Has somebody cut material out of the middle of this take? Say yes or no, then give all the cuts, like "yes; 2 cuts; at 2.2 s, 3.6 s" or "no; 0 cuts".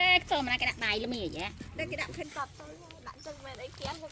yes; 1 cut; at 2.3 s